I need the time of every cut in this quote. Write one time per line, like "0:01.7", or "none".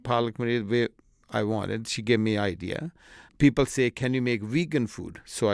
0:03.3